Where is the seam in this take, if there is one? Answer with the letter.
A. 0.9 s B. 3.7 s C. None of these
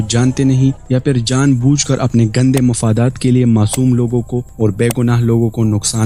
C